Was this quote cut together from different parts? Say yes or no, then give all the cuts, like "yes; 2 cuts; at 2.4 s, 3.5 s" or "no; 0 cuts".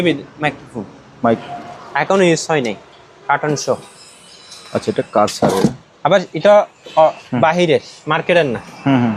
yes; 1 cut; at 1.4 s